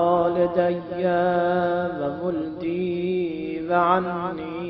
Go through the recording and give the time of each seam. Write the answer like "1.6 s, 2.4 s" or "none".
1.5 s